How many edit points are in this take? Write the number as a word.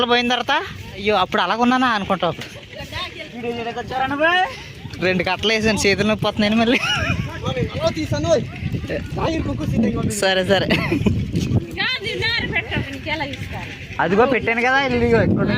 four